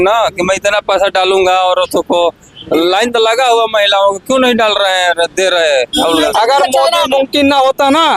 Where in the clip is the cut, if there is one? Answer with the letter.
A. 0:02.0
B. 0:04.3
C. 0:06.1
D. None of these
C